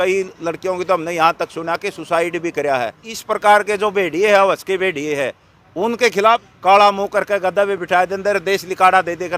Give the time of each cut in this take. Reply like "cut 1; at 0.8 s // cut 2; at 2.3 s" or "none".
cut 1; at 3.1 s // cut 2; at 6.5 s